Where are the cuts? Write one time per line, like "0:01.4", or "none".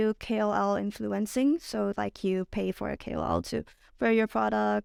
none